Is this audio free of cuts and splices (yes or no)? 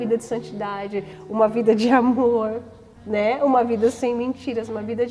yes